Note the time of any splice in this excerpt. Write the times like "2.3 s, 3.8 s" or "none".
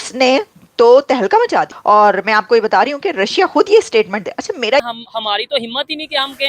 1.7 s, 4.8 s